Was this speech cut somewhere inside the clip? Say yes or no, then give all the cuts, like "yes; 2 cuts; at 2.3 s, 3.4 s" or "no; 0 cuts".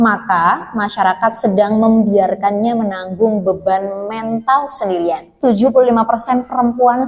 yes; 1 cut; at 5.3 s